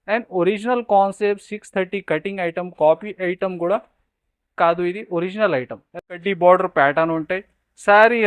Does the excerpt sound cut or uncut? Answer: cut